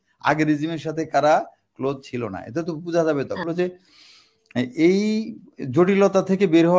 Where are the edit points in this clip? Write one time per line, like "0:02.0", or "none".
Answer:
0:03.5